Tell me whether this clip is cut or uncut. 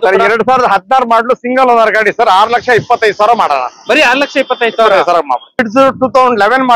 cut